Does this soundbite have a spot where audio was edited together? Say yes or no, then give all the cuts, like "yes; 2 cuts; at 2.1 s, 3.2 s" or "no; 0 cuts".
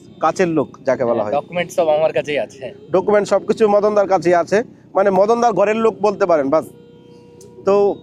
no; 0 cuts